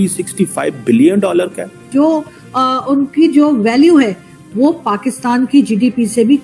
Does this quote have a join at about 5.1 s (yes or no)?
no